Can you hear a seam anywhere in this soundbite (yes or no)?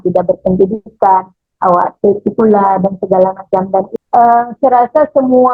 yes